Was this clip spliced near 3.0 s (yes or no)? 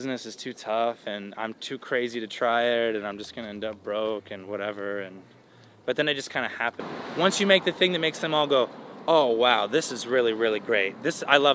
no